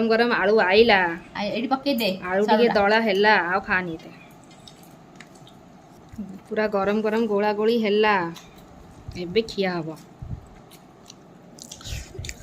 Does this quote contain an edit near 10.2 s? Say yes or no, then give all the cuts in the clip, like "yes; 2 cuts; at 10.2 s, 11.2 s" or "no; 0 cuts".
no; 1 cut; at 6.0 s